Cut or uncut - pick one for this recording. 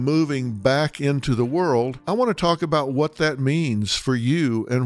cut